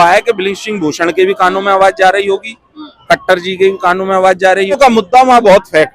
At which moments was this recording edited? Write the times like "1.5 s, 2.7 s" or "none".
4.8 s